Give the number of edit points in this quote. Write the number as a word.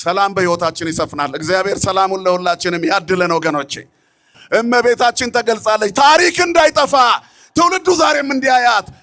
one